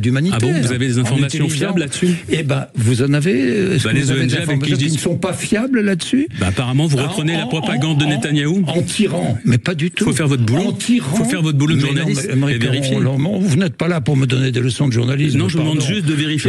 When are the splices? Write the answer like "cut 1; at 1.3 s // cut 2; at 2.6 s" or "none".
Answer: none

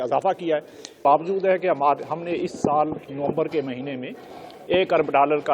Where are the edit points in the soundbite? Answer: cut 1; at 1.0 s

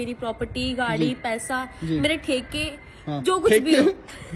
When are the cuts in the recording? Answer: none

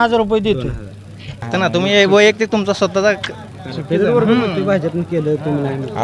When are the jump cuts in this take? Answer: cut 1; at 1.3 s

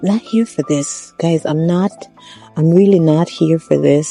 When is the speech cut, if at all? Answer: none

